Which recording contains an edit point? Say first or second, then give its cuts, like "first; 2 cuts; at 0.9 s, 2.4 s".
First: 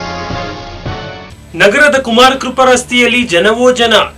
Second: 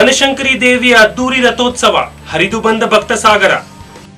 first; 1 cut; at 1.2 s